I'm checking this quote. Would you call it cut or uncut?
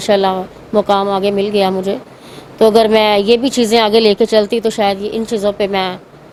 uncut